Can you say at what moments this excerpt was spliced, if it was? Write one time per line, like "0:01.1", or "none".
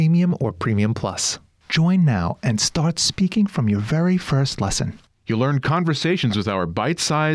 0:01.3

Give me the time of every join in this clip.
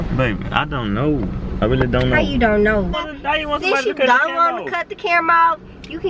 0:02.9

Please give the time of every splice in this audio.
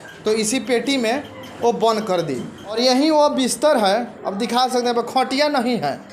none

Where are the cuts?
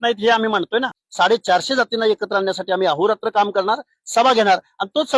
0:01.0

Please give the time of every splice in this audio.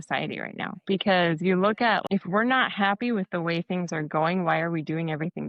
0:02.0

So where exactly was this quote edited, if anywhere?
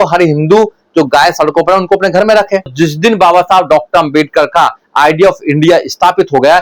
0:02.7

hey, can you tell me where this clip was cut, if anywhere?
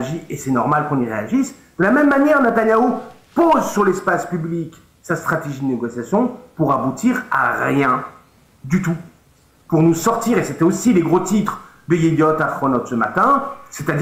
none

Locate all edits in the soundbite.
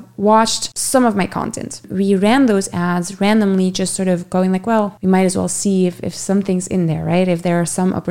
0:01.8

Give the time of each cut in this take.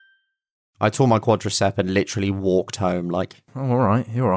0:01.0
0:03.5

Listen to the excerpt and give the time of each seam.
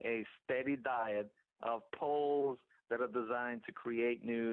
0:03.4

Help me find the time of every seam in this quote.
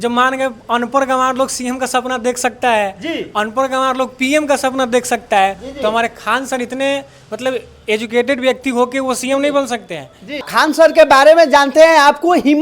0:10.5

